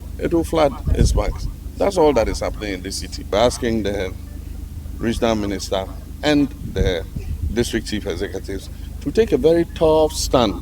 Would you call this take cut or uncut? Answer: cut